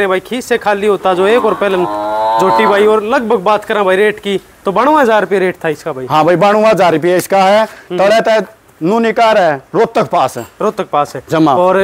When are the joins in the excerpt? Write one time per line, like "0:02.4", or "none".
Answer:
none